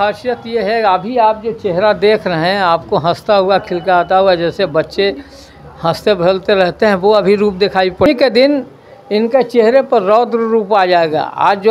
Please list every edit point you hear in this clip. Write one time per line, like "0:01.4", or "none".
0:08.1

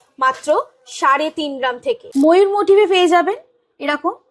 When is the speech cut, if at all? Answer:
0:02.0

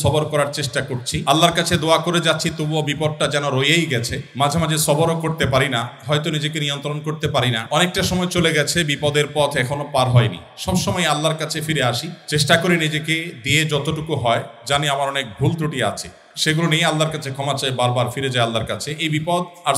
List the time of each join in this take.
none

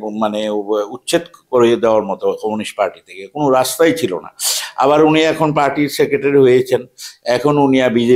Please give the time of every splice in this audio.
none

